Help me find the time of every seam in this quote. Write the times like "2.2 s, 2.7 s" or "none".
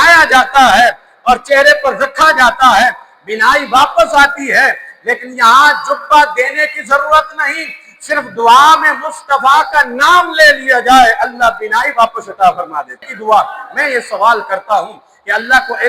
13.0 s

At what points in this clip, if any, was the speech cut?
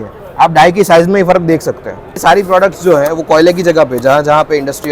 2.2 s

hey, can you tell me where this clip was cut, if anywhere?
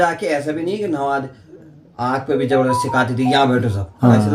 none

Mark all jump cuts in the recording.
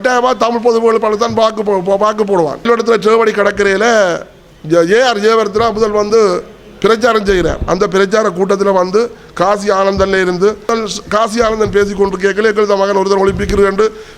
2.6 s, 10.7 s

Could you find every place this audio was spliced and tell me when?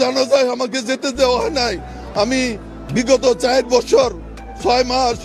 2.7 s

